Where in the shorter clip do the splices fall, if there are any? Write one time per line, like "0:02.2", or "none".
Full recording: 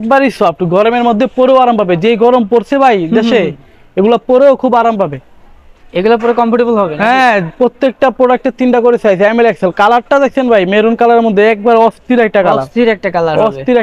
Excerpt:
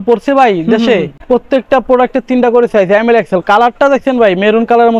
0:01.2